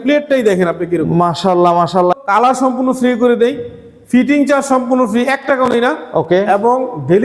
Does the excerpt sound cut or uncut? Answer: cut